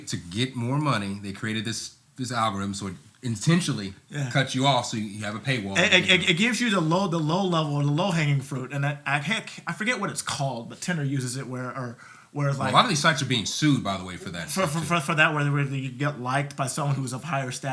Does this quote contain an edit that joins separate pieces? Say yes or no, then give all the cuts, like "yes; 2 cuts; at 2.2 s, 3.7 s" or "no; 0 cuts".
no; 0 cuts